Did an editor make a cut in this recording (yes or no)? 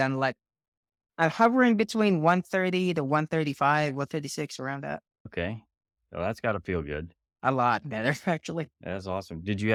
no